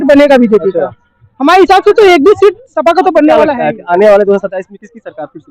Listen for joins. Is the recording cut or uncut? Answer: cut